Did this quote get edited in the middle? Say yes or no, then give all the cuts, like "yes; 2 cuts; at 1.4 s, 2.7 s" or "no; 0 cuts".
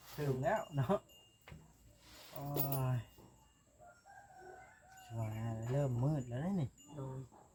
no; 0 cuts